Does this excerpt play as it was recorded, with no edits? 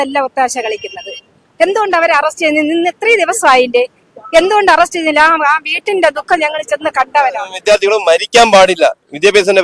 no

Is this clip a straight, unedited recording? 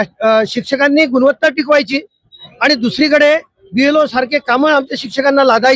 yes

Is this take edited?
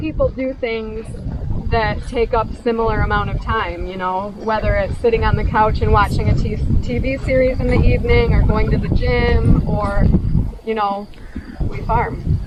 no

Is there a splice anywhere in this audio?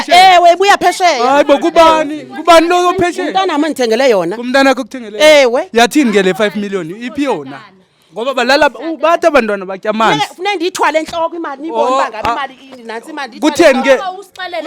no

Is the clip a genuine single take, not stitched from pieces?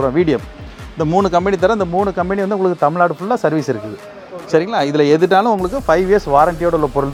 yes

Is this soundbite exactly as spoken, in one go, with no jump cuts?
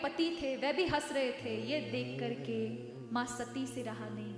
yes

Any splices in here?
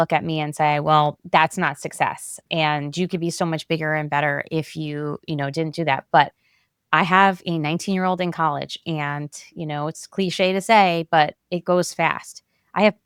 no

